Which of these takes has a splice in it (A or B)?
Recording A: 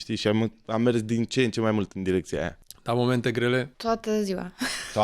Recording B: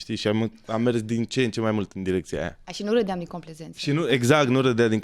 A